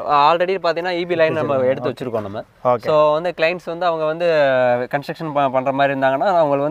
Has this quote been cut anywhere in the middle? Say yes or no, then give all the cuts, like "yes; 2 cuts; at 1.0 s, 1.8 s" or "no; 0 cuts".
no; 0 cuts